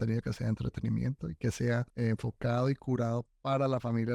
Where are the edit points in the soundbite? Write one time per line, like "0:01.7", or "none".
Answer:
0:01.9

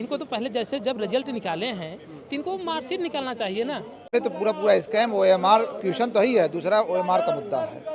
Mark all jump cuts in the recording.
0:04.1

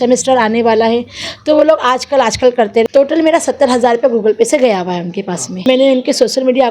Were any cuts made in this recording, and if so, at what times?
0:02.8
0:05.6

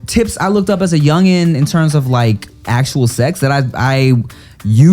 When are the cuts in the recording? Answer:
0:02.7

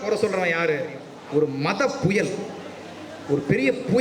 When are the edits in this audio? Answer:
0:01.1

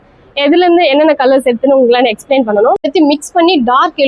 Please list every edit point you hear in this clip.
0:02.9

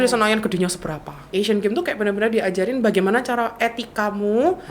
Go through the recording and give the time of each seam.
0:01.2

